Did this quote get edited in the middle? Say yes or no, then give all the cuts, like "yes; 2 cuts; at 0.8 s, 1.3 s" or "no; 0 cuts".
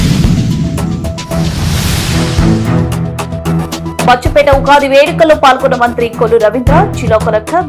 no; 0 cuts